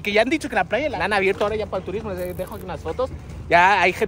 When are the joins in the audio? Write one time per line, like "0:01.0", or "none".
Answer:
0:00.9